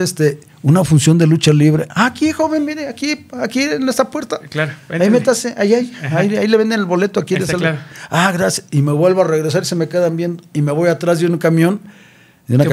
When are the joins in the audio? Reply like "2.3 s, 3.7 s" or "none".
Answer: none